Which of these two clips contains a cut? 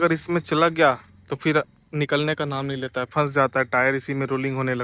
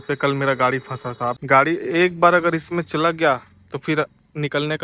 second; 1 cut; at 1.4 s

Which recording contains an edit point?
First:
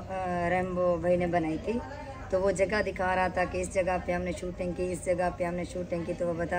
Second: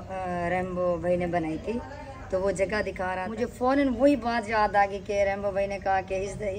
second; 1 cut; at 3.2 s

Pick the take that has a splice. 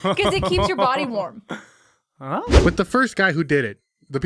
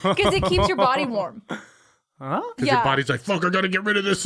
first; 1 cut; at 2.6 s

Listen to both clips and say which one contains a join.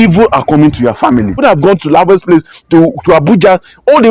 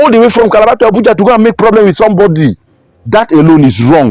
first; 1 cut; at 1.4 s

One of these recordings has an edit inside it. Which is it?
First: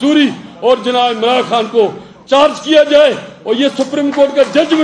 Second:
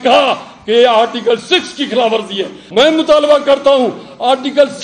second; 1 cut; at 2.6 s

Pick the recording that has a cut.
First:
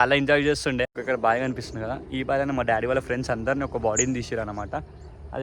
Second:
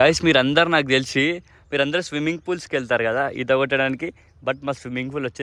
first; 1 cut; at 1.0 s

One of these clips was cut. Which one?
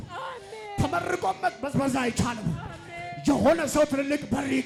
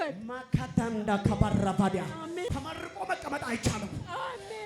second; 1 cut; at 2.5 s

